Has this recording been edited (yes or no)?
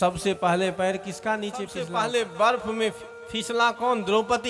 yes